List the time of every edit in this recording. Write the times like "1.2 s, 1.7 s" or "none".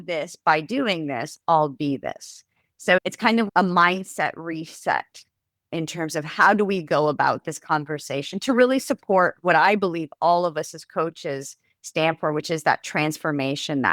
3.0 s, 5.7 s